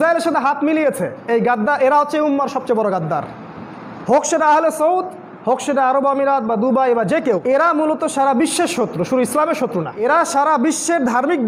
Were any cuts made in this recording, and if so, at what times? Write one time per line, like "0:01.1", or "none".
0:07.4
0:09.9

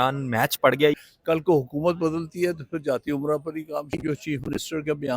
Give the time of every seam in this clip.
0:00.9
0:04.0

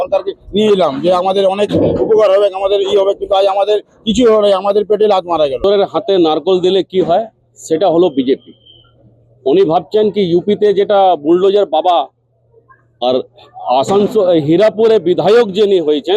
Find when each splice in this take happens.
0:05.6

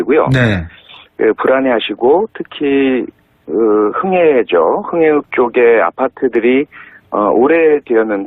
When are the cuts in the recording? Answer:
0:06.4

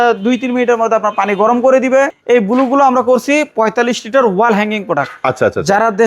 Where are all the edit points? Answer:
0:02.1

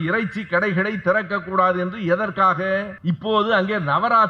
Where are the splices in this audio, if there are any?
0:02.9

